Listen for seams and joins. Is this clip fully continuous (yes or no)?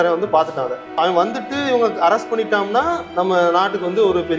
no